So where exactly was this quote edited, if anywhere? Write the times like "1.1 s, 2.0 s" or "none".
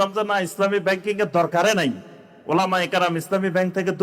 none